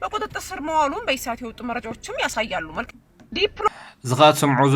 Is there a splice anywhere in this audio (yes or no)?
no